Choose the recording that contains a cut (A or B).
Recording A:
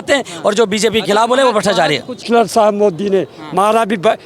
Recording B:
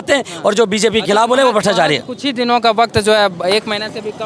A